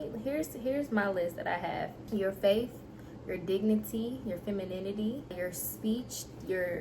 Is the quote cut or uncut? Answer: cut